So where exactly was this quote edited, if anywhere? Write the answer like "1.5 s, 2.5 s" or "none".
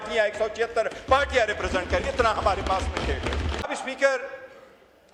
none

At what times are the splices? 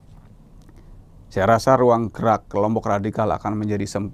none

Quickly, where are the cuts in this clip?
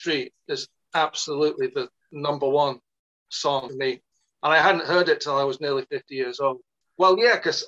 3.7 s, 6.9 s

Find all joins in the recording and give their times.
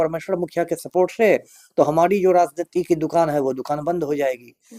none

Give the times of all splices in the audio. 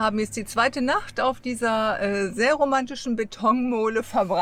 none

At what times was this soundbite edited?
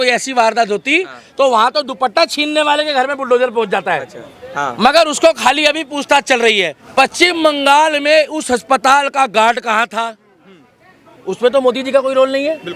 6.8 s

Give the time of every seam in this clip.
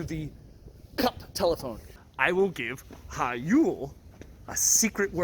2.0 s

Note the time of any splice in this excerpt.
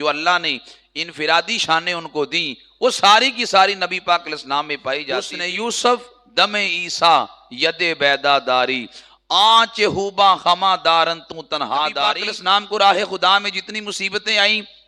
5.4 s, 12.1 s

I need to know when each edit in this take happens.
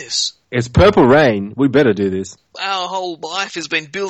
2.5 s

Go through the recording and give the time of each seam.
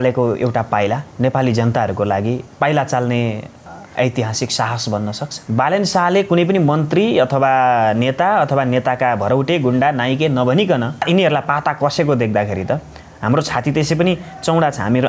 1.1 s, 2.5 s, 5.3 s, 11.0 s

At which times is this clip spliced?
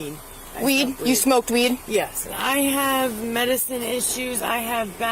2.3 s

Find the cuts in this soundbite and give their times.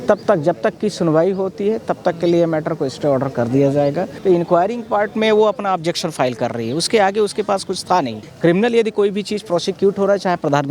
4.1 s, 8.2 s

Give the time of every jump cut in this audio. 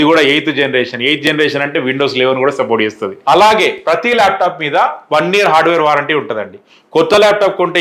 3.2 s

